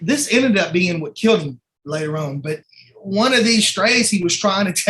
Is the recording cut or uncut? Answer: cut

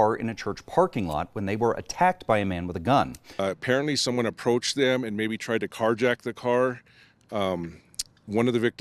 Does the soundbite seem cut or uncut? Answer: cut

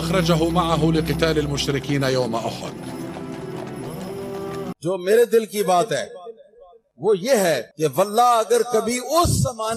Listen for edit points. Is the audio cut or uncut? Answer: cut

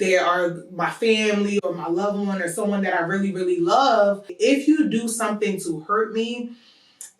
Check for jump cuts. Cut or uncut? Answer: cut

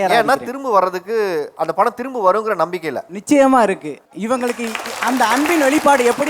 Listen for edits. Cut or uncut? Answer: uncut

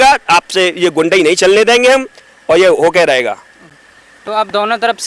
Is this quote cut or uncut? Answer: uncut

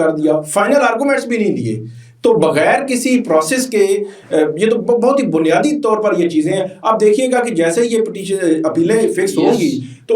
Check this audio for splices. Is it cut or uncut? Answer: uncut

